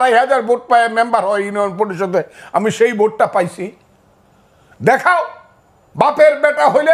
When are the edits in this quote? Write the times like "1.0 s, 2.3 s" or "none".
none